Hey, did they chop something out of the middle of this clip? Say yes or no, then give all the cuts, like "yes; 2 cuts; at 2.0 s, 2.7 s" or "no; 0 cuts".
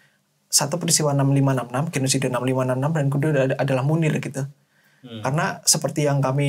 no; 0 cuts